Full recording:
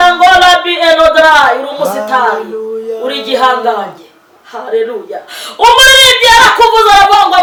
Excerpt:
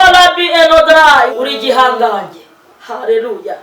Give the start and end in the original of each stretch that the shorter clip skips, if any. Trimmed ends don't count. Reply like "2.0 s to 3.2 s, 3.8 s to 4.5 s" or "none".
1.6 s to 3.0 s